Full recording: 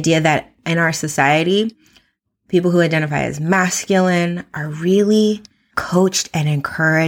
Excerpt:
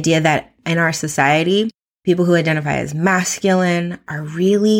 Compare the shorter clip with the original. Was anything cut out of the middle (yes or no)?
yes